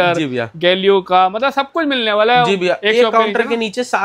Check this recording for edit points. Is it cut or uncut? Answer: uncut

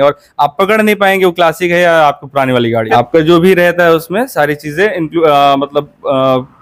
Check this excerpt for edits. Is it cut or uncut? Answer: uncut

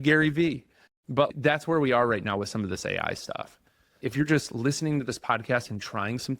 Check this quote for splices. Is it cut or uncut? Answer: cut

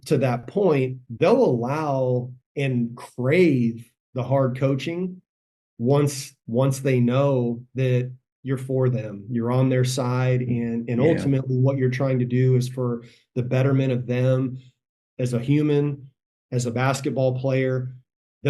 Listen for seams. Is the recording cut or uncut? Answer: uncut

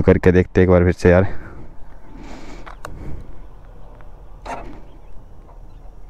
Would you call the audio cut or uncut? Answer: uncut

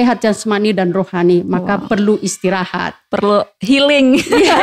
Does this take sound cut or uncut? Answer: uncut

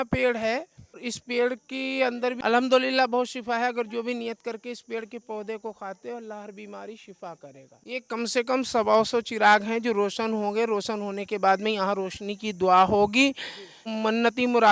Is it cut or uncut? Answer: cut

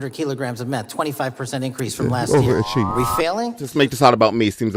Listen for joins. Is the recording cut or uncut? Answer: cut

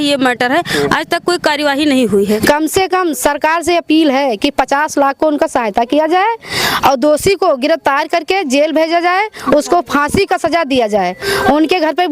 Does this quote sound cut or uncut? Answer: cut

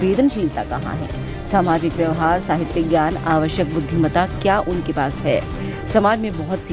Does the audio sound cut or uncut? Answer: uncut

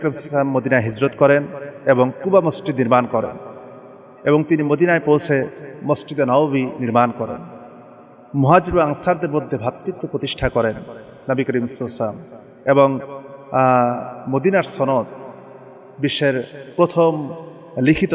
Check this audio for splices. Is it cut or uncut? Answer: uncut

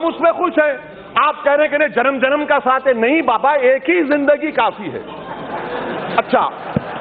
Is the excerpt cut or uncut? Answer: uncut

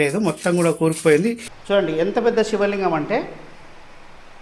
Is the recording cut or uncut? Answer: cut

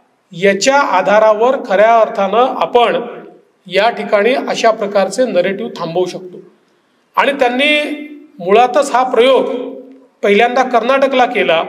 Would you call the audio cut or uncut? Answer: uncut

